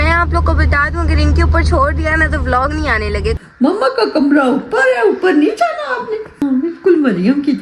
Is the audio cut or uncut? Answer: cut